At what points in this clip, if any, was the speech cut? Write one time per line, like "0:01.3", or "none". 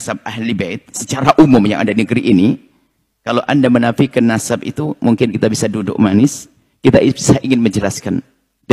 none